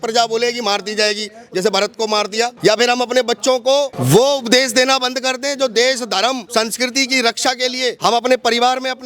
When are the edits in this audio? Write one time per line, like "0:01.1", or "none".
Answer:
0:02.5
0:04.0
0:06.4
0:08.0